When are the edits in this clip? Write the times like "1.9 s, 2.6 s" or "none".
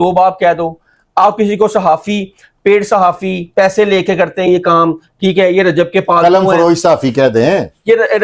none